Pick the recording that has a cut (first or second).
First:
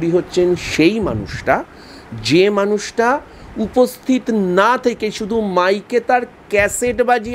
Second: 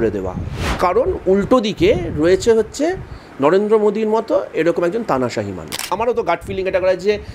second